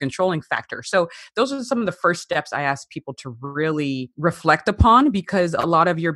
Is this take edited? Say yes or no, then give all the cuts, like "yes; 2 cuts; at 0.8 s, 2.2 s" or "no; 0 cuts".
yes; 1 cut; at 4.1 s